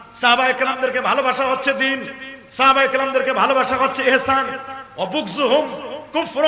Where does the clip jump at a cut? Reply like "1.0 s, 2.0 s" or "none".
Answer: none